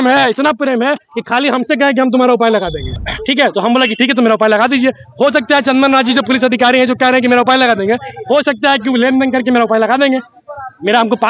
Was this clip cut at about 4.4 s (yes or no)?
no